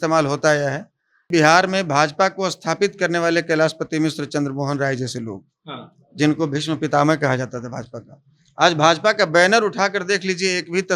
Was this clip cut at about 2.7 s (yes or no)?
no